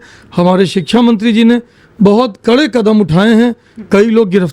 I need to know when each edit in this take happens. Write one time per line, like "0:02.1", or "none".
none